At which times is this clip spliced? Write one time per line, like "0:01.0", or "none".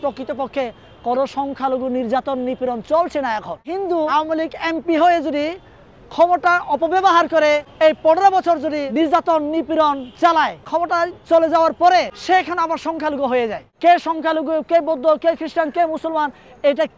0:04.1
0:07.7
0:08.9
0:10.7
0:12.2
0:13.6